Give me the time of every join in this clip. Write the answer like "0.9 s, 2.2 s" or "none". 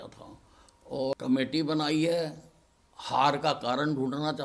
1.1 s